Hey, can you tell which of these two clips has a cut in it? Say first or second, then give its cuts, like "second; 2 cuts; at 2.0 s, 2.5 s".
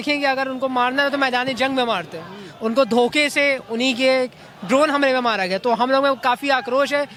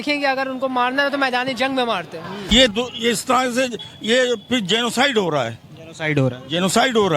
second; 1 cut; at 2.5 s